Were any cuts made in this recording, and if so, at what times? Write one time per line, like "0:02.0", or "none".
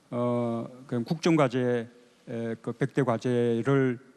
0:01.5